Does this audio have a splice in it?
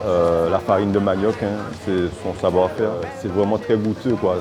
yes; 1 cut; at 3.1 s

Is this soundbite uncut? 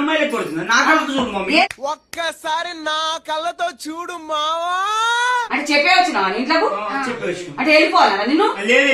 no; 1 cut; at 5.4 s

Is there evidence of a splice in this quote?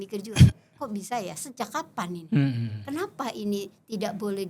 no; 0 cuts

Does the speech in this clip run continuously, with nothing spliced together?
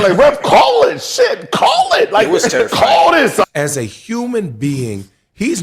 no; 1 cut; at 3.4 s

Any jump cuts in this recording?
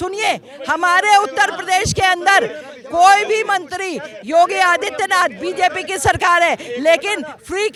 no; 0 cuts

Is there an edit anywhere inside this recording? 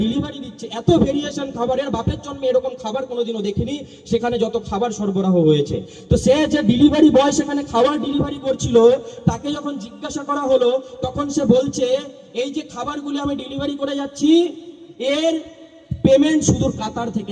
no; 0 cuts

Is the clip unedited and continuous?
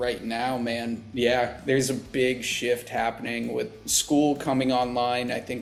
yes; 0 cuts

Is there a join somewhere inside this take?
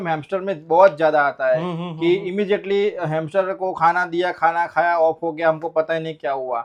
no; 0 cuts

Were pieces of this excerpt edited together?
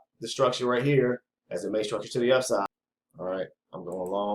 yes; 1 cut; at 2.7 s

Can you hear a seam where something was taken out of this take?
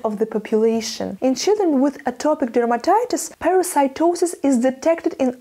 yes; 2 cuts; at 1.0 s, 3.3 s

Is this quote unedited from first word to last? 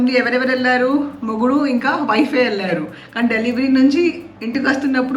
yes; 0 cuts

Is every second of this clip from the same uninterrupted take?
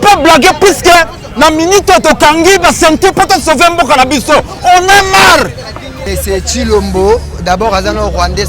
no; 1 cut; at 6.1 s

